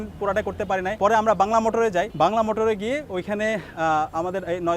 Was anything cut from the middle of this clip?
yes; 1 cut; at 0.9 s

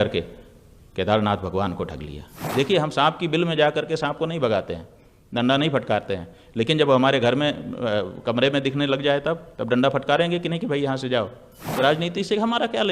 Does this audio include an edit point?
yes; 2 cuts; at 2.5 s, 11.7 s

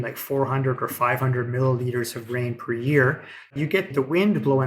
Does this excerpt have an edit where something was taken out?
yes; 1 cut; at 3.6 s

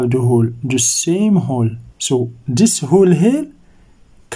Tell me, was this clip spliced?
yes; 1 cut; at 1.9 s

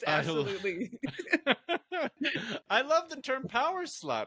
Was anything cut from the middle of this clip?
no; 0 cuts

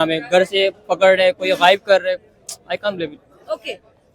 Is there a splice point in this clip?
no; 0 cuts

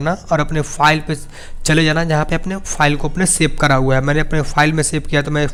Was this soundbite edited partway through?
no; 0 cuts

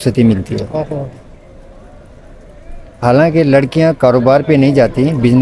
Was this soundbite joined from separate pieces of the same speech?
no; 0 cuts

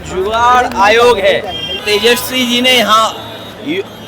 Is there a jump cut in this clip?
yes; 1 cut; at 1.8 s

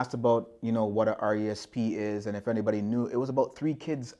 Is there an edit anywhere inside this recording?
no; 0 cuts

